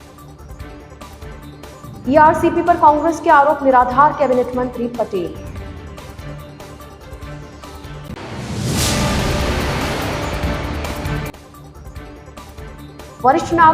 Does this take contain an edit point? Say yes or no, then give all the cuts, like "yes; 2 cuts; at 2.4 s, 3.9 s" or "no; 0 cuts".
yes; 1 cut; at 1.1 s